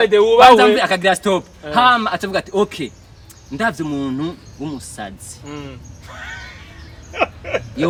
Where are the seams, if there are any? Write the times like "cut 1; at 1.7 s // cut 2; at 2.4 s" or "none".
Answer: none